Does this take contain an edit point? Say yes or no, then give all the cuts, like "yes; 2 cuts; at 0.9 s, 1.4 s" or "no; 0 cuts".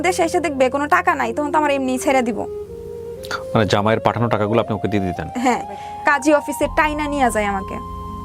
yes; 1 cut; at 5.8 s